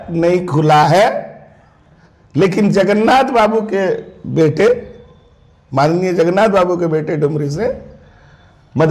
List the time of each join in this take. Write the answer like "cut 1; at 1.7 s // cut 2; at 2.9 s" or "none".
none